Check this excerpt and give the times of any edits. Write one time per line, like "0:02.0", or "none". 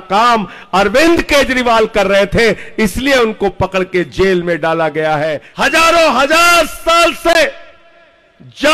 0:05.4